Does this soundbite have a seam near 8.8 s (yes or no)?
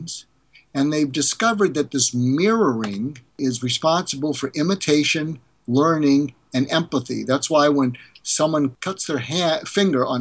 yes